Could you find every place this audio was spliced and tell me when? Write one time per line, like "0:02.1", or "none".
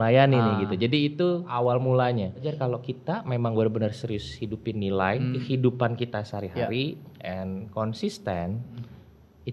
0:01.5
0:02.5
0:05.4